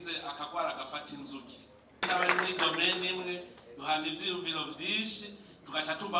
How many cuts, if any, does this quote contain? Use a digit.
1